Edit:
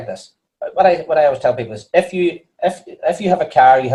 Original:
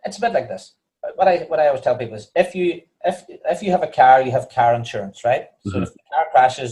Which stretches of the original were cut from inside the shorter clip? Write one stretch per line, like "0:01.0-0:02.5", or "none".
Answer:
none